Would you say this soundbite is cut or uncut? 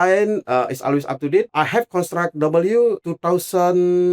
cut